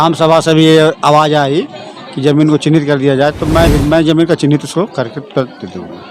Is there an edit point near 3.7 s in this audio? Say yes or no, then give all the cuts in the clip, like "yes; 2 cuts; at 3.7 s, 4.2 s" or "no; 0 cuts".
yes; 1 cut; at 3.7 s